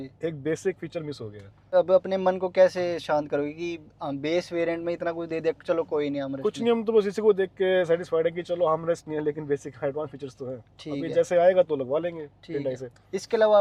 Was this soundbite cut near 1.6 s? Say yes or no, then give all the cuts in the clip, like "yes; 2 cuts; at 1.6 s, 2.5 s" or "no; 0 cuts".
no; 0 cuts